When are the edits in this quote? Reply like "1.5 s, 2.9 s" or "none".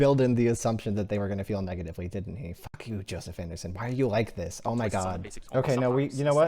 5.3 s